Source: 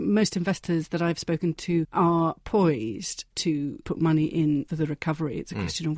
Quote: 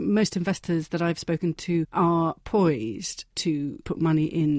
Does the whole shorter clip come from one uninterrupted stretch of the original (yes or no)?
yes